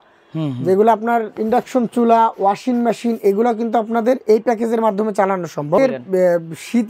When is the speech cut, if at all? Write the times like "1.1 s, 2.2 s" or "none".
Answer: 5.8 s